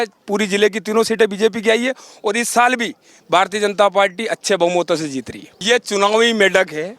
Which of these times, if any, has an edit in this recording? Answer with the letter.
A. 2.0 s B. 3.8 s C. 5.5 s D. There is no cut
C